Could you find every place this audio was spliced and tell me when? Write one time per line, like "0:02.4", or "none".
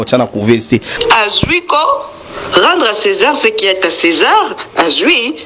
0:00.9